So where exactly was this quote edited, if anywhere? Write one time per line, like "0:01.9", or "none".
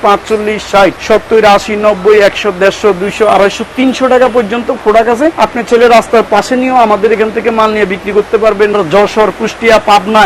0:01.0
0:05.3
0:08.8